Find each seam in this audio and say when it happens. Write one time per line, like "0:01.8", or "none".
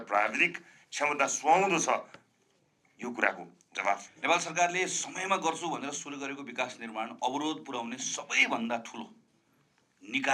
0:04.1